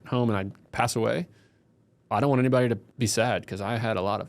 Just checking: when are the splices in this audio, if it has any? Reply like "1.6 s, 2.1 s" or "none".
2.9 s